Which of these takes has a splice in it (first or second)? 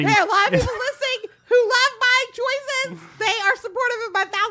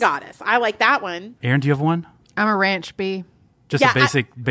second